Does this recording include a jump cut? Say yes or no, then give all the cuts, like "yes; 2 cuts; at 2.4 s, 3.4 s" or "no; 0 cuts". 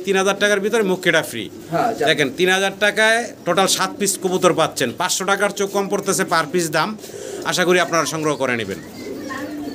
no; 0 cuts